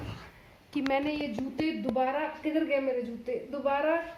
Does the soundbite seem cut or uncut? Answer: uncut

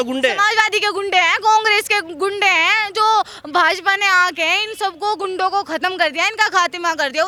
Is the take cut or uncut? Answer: uncut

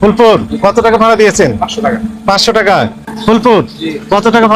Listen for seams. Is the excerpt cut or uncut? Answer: cut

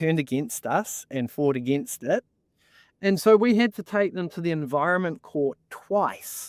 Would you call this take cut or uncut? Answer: uncut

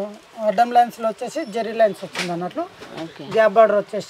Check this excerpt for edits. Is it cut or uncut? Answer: uncut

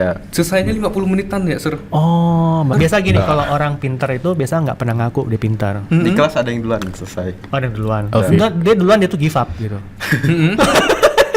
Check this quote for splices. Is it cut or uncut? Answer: cut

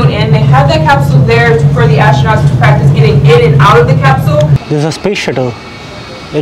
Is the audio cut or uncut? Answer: cut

